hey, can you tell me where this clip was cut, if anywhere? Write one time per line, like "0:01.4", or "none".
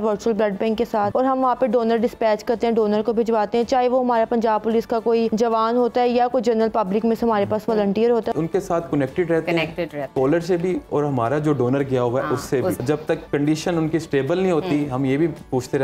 0:01.1
0:05.3
0:08.3
0:12.8